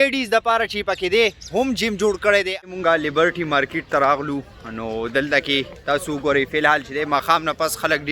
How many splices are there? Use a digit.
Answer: 1